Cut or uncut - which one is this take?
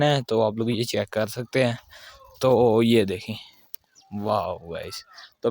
uncut